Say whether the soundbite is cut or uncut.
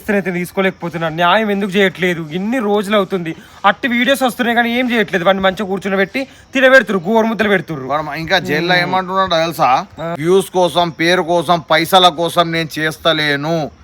cut